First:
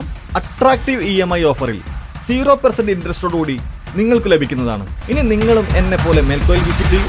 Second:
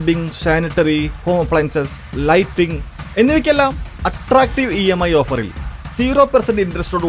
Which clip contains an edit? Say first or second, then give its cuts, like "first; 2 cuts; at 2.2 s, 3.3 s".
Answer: first; 1 cut; at 4.9 s